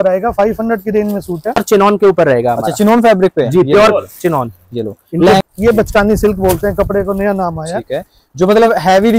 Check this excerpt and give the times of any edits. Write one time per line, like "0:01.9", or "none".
0:01.6
0:05.4